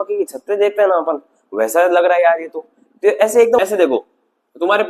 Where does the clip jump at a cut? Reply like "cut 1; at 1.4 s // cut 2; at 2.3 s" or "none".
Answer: cut 1; at 3.6 s